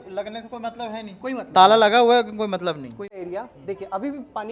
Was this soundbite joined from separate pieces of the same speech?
yes; 1 cut; at 3.0 s

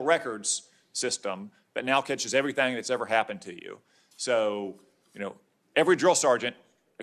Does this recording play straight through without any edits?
yes; 0 cuts

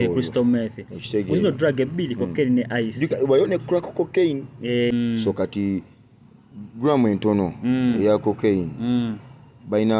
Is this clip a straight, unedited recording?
no; 1 cut; at 4.9 s

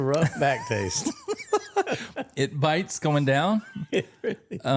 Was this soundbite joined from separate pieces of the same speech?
no; 0 cuts

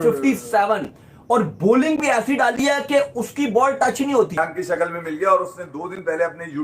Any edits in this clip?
yes; 1 cut; at 4.4 s

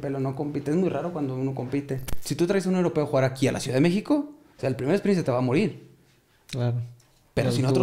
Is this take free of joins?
no; 1 cut; at 2.1 s

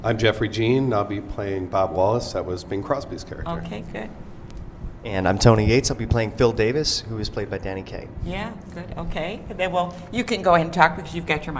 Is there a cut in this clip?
yes; 1 cut; at 1.9 s

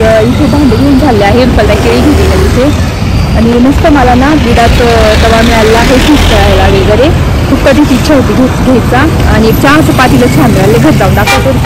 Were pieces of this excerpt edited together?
no; 0 cuts

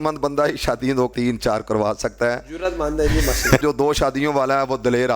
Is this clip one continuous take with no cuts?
no; 2 cuts; at 1.1 s, 3.6 s

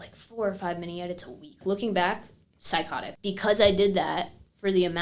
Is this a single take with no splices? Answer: no; 2 cuts; at 1.6 s, 3.0 s

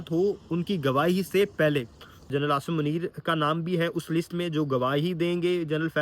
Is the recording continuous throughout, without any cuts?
no; 1 cut; at 2.2 s

